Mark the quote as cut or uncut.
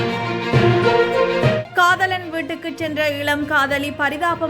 uncut